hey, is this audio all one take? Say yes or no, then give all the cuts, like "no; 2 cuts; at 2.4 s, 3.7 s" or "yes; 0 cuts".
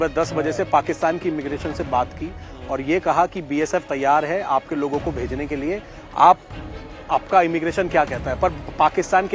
yes; 0 cuts